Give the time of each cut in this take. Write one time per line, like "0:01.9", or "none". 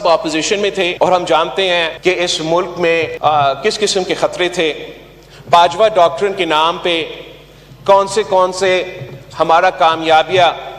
0:00.9
0:01.9
0:03.1